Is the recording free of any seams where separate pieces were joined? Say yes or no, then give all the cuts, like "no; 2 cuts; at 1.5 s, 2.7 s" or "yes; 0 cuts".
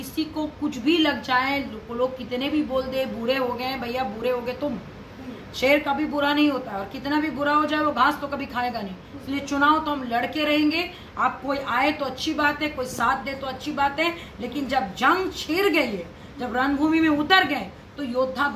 yes; 0 cuts